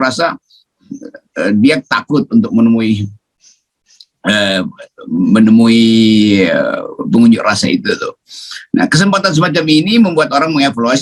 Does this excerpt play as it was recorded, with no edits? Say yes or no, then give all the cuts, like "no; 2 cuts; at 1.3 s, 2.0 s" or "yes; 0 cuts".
yes; 0 cuts